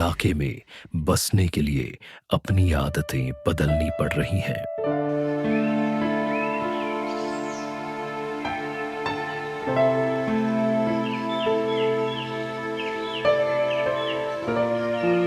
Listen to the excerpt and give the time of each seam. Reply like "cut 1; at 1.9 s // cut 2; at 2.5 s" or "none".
none